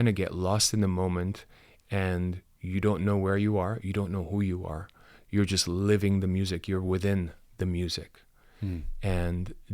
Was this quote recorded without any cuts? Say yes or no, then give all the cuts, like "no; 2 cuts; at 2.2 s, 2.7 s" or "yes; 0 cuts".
yes; 0 cuts